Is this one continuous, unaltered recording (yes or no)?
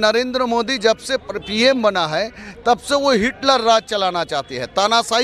yes